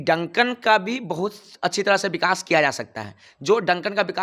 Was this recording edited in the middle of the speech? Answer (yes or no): no